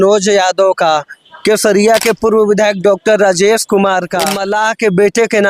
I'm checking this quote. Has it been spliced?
yes; 1 cut; at 4.4 s

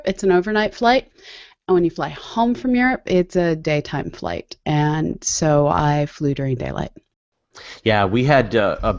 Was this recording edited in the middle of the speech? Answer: yes; 1 cut; at 6.9 s

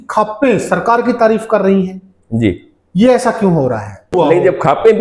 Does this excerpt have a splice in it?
yes; 1 cut; at 4.1 s

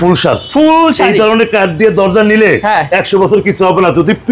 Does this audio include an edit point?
no; 0 cuts

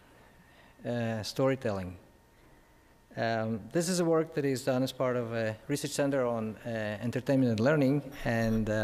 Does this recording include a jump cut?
no; 0 cuts

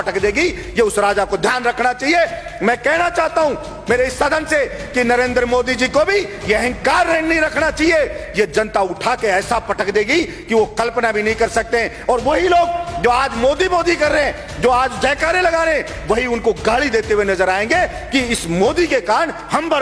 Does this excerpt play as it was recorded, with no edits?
yes; 0 cuts

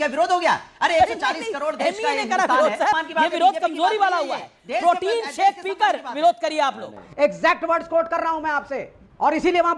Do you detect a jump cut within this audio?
yes; 2 cuts; at 3.0 s, 7.0 s

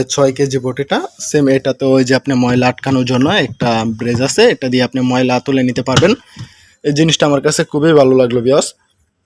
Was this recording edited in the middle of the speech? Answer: no; 0 cuts

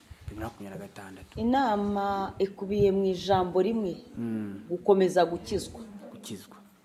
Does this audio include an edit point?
no; 0 cuts

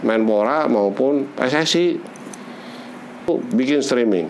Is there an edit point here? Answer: yes; 1 cut; at 3.3 s

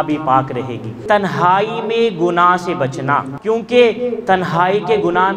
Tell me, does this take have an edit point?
yes; 2 cuts; at 1.0 s, 3.3 s

